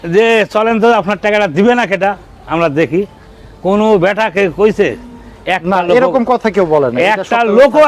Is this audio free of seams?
yes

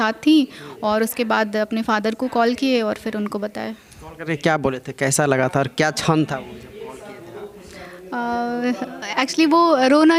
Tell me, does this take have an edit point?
no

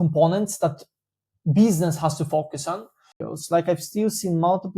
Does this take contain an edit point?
yes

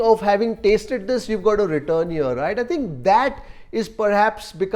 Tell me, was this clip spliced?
no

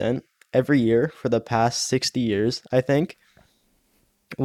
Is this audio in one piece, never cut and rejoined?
yes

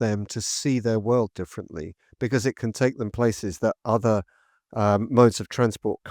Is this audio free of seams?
yes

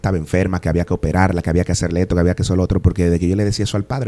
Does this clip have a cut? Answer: no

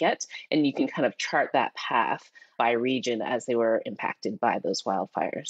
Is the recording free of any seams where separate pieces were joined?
yes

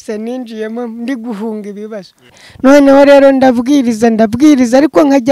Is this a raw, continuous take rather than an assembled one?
no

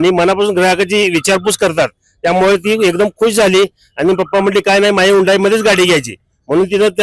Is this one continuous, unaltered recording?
yes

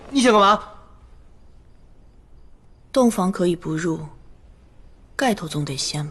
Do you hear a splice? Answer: no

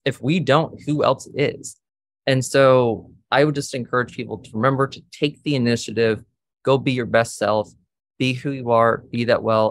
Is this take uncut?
yes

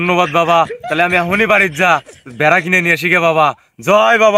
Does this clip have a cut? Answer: no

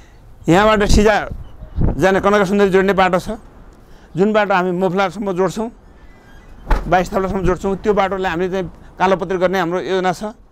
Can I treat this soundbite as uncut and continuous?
yes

